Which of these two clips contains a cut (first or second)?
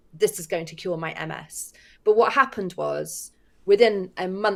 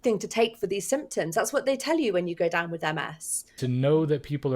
second